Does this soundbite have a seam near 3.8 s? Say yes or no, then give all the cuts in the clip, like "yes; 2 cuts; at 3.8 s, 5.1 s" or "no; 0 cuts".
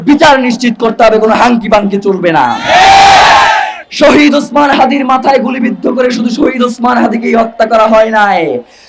yes; 1 cut; at 3.8 s